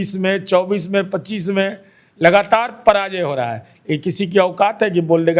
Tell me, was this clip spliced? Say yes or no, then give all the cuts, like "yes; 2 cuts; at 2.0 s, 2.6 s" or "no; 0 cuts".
no; 0 cuts